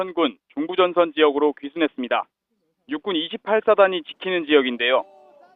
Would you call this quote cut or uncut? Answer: uncut